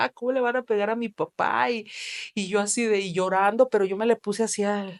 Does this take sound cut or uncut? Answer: uncut